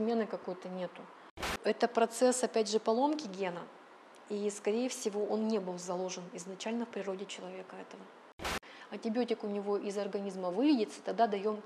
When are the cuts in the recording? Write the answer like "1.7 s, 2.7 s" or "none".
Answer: 1.5 s, 8.4 s